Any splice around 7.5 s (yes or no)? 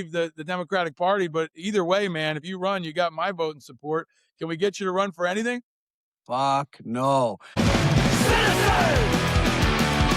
yes